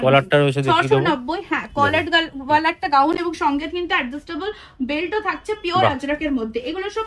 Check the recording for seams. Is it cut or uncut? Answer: uncut